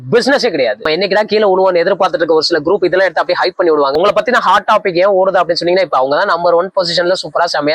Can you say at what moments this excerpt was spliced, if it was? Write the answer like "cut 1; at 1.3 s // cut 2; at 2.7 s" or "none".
cut 1; at 0.8 s // cut 2; at 4.0 s